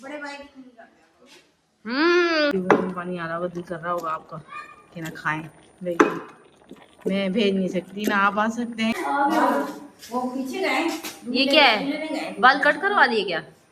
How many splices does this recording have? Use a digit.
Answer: 2